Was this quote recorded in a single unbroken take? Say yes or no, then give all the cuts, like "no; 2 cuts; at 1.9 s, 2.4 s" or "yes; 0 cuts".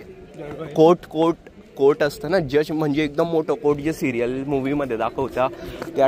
yes; 0 cuts